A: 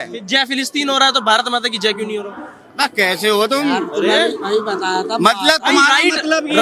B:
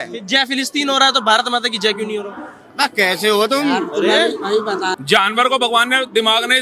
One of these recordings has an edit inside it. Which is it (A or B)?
B